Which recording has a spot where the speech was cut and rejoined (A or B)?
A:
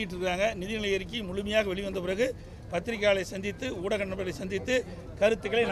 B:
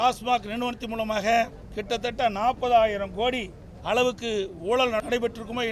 B